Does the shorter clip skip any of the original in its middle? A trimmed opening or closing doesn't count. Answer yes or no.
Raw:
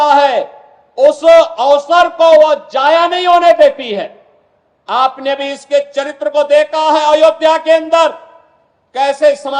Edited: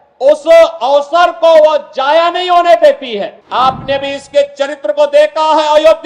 yes